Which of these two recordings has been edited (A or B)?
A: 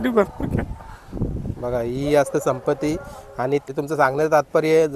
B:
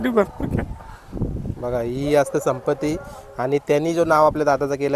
A